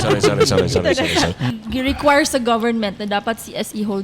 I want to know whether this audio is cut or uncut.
cut